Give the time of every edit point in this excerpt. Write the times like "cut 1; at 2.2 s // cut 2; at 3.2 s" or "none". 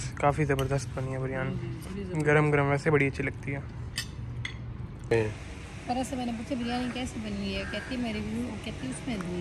cut 1; at 5.1 s